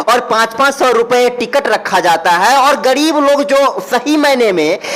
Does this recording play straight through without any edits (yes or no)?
yes